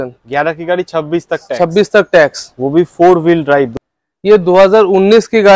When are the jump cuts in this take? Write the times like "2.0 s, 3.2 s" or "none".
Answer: 3.8 s